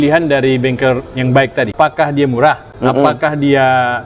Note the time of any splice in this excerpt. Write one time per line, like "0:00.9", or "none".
0:01.7
0:02.7

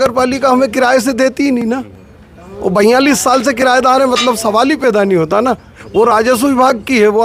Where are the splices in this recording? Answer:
none

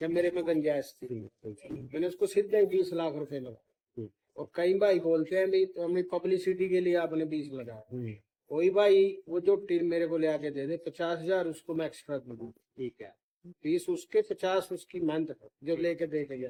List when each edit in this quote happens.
none

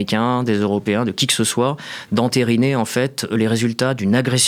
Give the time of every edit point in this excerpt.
none

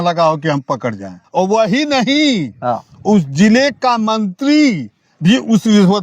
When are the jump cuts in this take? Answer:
0:01.2

